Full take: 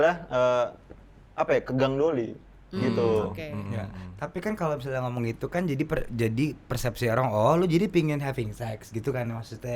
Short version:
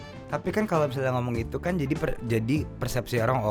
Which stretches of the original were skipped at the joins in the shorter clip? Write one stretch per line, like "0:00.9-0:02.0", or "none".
none